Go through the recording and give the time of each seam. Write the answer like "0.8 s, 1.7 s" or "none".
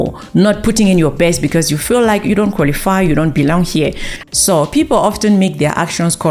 4.1 s